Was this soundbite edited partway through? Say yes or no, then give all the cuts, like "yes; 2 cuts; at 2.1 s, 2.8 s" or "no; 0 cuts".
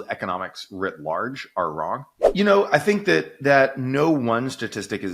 yes; 1 cut; at 2.2 s